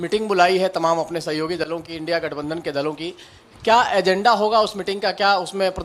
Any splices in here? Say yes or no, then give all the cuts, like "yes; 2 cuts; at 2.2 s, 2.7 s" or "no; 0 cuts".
no; 0 cuts